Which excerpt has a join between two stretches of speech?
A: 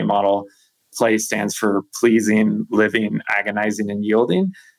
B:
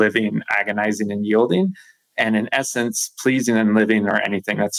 A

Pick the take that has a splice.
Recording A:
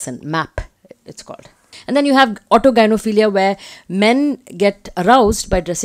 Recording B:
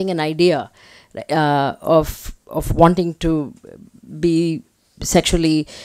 A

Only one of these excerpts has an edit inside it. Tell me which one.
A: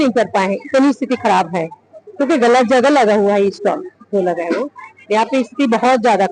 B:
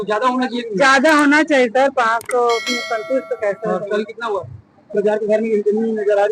B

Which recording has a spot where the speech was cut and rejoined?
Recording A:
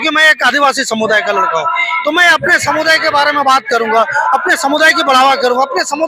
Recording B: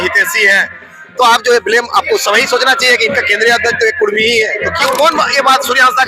B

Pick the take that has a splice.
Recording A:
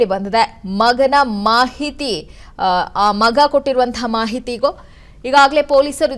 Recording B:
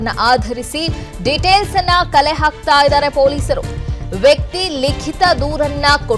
B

